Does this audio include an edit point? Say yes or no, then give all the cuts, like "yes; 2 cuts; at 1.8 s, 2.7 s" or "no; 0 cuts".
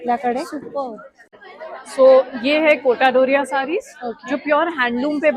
yes; 1 cut; at 1.5 s